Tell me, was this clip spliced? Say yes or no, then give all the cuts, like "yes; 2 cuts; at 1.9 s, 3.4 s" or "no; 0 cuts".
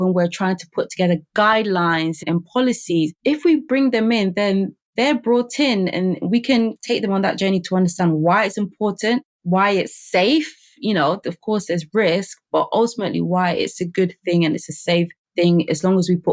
yes; 2 cuts; at 2.2 s, 6.8 s